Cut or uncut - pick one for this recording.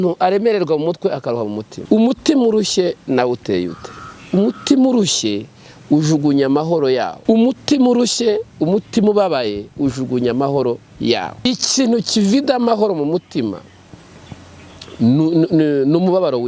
cut